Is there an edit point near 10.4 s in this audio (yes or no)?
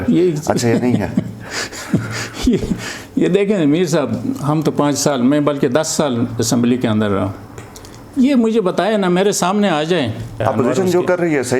yes